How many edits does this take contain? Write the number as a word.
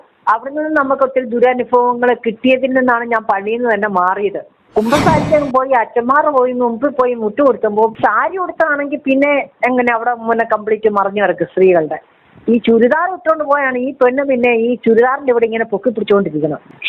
two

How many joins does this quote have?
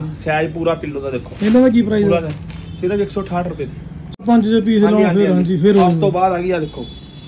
one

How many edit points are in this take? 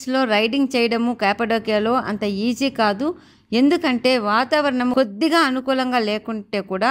zero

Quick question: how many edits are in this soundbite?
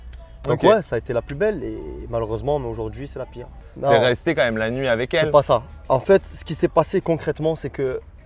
one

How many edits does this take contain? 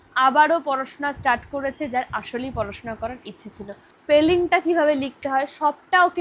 one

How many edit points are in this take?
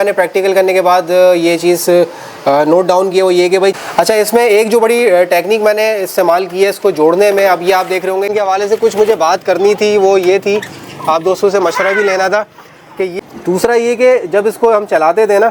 three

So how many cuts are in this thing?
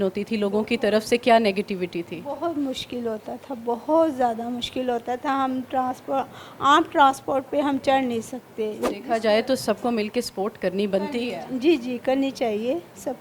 one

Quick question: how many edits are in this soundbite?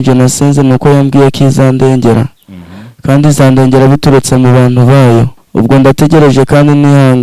one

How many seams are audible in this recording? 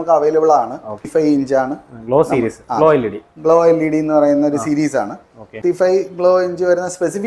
two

